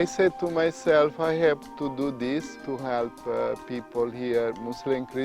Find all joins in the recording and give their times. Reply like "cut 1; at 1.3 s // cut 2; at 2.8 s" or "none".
cut 1; at 2.6 s